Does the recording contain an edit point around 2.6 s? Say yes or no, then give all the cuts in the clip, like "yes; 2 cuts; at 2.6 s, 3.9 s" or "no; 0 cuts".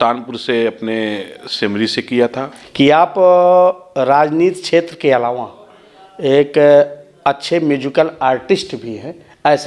yes; 1 cut; at 2.6 s